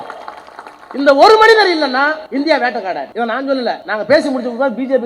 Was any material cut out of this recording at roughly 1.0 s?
no; 3 cuts; at 2.2 s, 3.1 s, 3.8 s

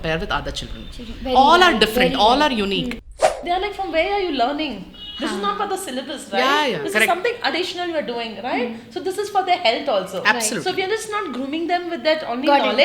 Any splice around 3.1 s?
yes; 1 cut; at 3.1 s

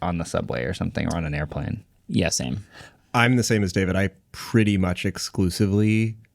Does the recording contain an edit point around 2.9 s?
yes; 1 cut; at 2.9 s

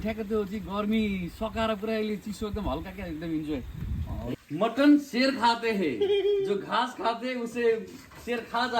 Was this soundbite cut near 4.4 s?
yes; 1 cut; at 4.4 s

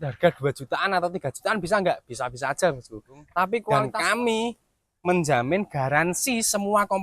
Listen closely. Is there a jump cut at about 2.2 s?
no; 1 cut; at 3.7 s

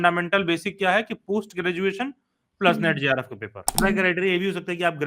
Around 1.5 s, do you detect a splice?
no; 1 cut; at 3.8 s

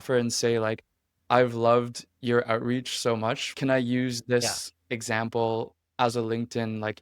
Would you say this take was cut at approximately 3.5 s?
yes; 1 cut; at 3.5 s

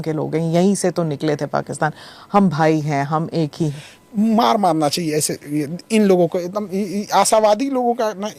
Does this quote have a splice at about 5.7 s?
yes; 2 cuts; at 3.7 s, 5.7 s

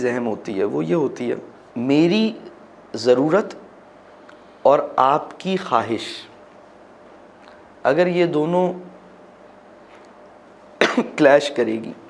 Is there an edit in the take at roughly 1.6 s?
yes; 1 cut; at 1.6 s

